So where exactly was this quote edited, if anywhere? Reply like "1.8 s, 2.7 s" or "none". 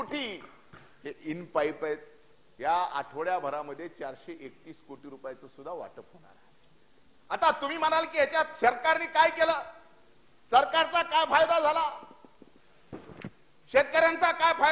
none